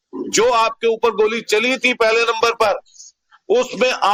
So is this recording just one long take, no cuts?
yes; 0 cuts

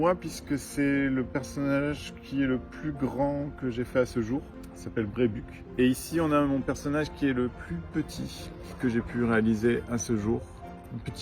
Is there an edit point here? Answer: no; 0 cuts

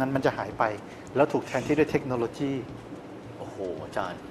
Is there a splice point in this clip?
no; 0 cuts

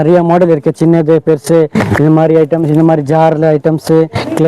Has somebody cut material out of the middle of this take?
no; 0 cuts

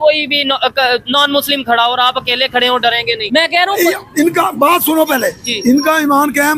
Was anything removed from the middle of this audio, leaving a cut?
yes; 1 cut; at 3.2 s

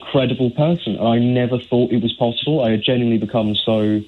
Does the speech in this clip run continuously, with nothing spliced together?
yes; 0 cuts

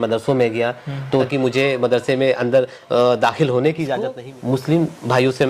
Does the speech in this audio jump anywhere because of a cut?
yes; 2 cuts; at 1.3 s, 4.2 s

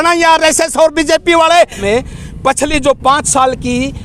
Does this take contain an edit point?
yes; 1 cut; at 1.8 s

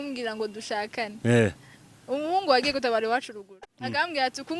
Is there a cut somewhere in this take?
yes; 1 cut; at 3.4 s

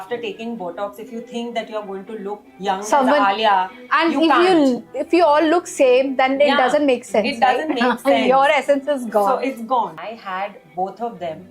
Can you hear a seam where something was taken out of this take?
yes; 1 cut; at 10.1 s

